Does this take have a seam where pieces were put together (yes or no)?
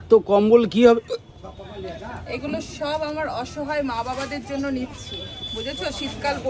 no